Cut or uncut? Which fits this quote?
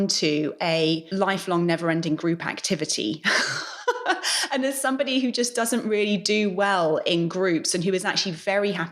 cut